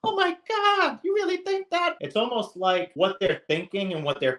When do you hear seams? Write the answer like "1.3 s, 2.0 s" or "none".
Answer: 1.9 s, 2.9 s